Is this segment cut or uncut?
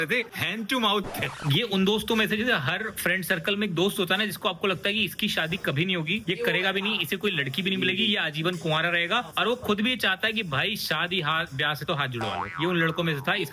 cut